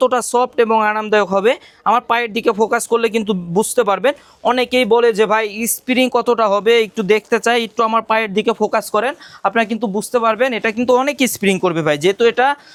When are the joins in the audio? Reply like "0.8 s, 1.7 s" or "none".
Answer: none